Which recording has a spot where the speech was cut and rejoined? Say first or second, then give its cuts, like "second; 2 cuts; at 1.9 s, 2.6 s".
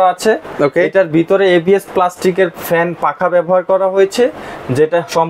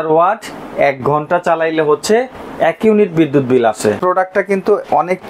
second; 1 cut; at 4.0 s